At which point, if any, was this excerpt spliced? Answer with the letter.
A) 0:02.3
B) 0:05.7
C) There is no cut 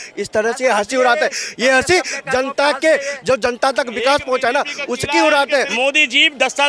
B